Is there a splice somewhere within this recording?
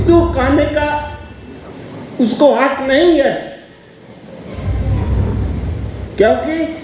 no; 0 cuts

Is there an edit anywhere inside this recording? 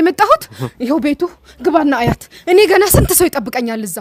no; 0 cuts

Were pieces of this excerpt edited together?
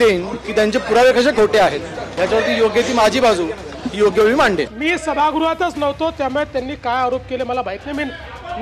yes; 1 cut; at 2.0 s

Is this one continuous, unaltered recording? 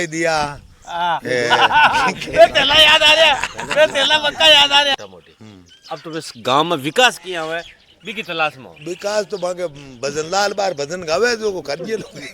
no; 1 cut; at 4.9 s

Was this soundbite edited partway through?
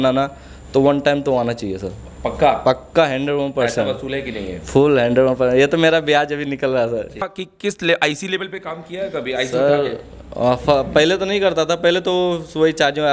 yes; 1 cut; at 7.3 s

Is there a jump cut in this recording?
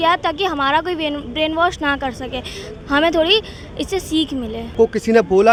no; 0 cuts

